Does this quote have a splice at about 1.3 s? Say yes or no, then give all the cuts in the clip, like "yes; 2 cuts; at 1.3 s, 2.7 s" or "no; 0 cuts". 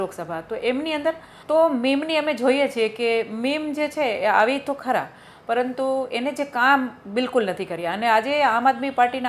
yes; 1 cut; at 1.3 s